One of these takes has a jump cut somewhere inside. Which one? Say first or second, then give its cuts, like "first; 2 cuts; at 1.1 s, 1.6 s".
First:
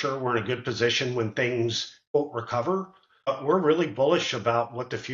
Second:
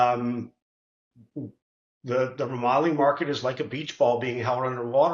first; 2 cuts; at 2.1 s, 3.3 s